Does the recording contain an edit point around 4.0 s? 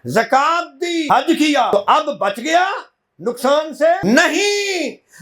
yes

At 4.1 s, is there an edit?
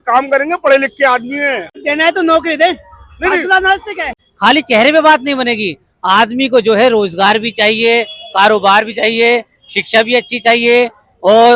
yes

